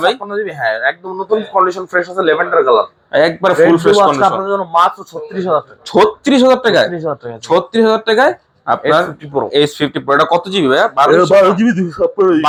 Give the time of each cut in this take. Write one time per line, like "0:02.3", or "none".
none